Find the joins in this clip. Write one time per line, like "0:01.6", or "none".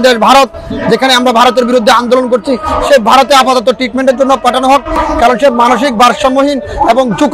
0:04.9